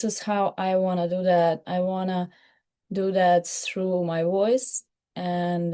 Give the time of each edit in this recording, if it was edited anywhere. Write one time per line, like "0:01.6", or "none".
none